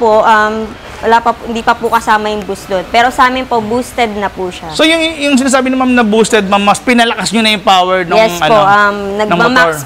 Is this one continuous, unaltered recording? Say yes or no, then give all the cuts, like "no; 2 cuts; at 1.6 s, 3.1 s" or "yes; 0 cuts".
yes; 0 cuts